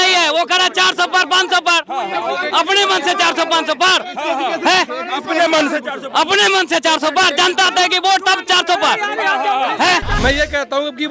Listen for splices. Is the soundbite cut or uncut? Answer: cut